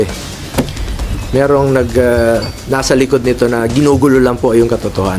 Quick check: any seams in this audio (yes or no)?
no